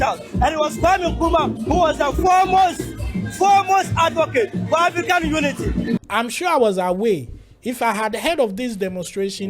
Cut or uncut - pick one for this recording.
cut